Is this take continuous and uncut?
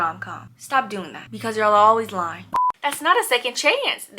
no; 1 cut; at 2.4 s

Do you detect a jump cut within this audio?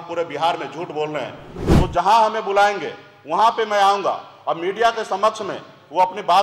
yes; 1 cut; at 1.5 s

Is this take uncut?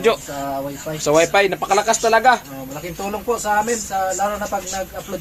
yes; 0 cuts

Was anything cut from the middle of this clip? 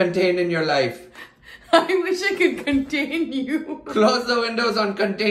no; 0 cuts

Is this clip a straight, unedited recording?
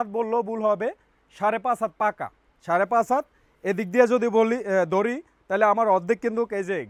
yes; 0 cuts

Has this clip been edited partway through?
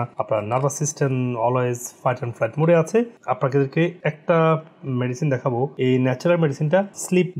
no; 0 cuts

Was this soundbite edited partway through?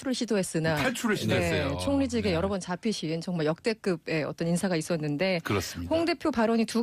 yes; 1 cut; at 3.4 s

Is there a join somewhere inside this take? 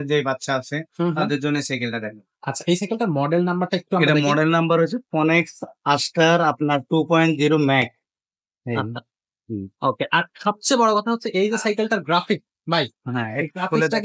no; 0 cuts

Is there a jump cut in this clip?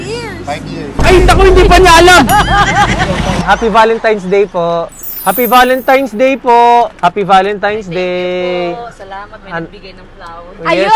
yes; 3 cuts; at 3.4 s, 5.1 s, 6.9 s

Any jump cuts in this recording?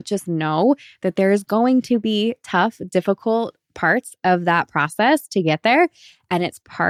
no; 0 cuts

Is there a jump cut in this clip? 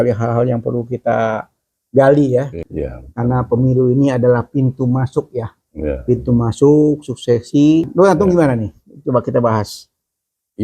yes; 2 cuts; at 2.6 s, 7.9 s

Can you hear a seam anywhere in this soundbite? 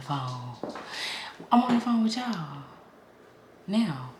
no; 0 cuts

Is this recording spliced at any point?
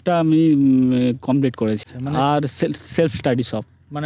no; 0 cuts

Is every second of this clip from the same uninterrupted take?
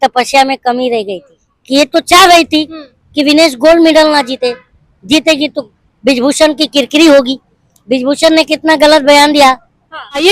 yes; 0 cuts

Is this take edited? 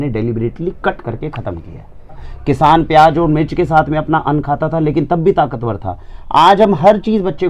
yes; 1 cut; at 2.3 s

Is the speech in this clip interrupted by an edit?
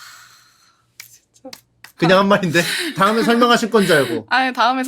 yes; 2 cuts; at 1.9 s, 2.9 s

